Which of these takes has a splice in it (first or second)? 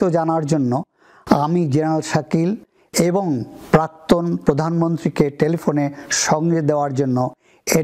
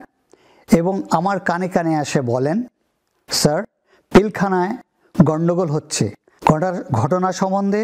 second